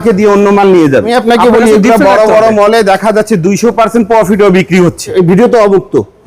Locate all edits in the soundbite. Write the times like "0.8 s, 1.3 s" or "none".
1.1 s, 5.1 s